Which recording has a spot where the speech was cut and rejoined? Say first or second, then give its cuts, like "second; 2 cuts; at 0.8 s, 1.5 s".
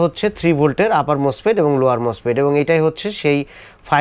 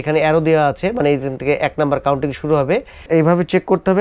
second; 1 cut; at 2.9 s